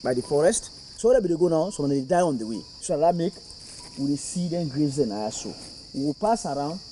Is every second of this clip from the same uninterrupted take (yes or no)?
no